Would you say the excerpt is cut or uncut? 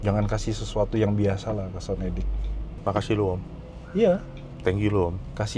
uncut